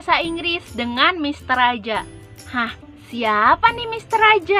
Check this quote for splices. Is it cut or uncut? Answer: uncut